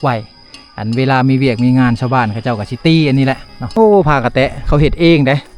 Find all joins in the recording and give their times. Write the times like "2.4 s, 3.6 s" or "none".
3.5 s